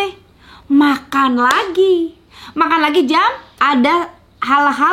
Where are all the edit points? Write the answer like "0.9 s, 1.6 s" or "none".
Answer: 3.5 s